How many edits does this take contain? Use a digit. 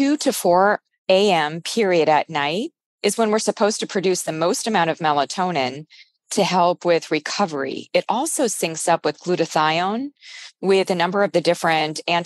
1